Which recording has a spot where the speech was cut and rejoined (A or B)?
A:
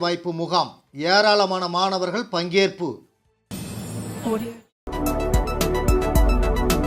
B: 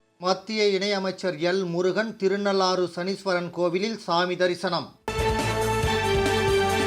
A